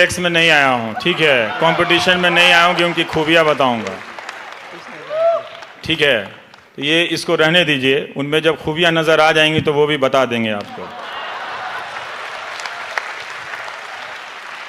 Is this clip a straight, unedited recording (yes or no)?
yes